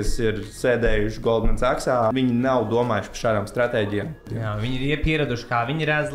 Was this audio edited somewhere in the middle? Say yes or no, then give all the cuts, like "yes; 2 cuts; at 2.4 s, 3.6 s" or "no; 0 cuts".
yes; 2 cuts; at 2.1 s, 4.2 s